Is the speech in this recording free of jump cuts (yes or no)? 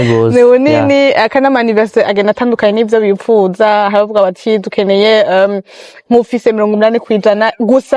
yes